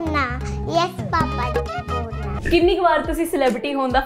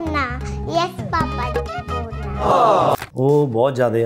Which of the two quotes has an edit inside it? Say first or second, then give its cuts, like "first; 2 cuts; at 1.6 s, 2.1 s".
first; 1 cut; at 2.3 s